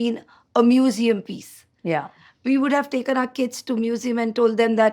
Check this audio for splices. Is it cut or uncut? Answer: uncut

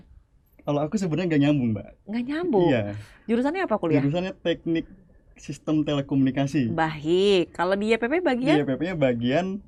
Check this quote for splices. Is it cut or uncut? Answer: uncut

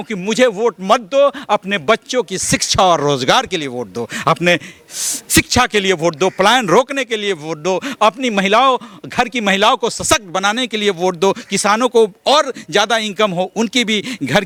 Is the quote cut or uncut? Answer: uncut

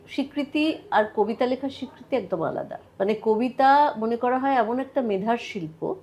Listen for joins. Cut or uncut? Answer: uncut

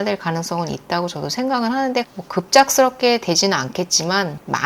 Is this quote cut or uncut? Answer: cut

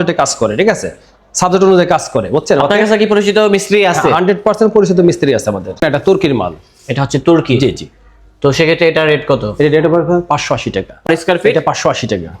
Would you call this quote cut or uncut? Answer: cut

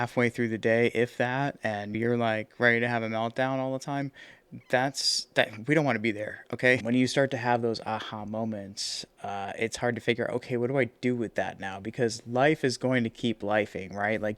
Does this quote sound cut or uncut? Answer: cut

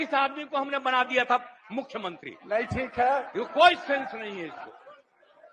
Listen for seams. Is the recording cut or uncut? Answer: uncut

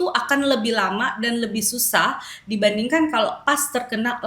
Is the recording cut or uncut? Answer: uncut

